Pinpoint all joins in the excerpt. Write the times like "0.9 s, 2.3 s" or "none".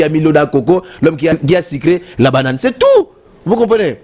1.4 s